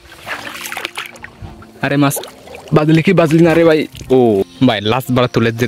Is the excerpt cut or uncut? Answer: cut